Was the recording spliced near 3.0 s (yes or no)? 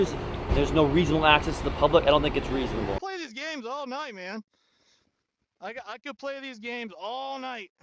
yes